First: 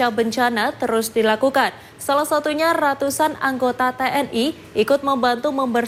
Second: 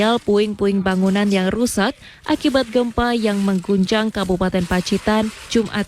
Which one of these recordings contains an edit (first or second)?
second